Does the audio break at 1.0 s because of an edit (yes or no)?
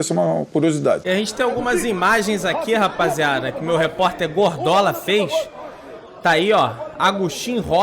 yes